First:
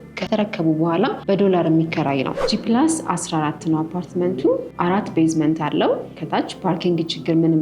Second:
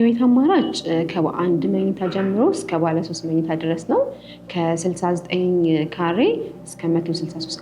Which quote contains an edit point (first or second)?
first